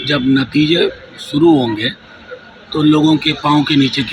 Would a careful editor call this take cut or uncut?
uncut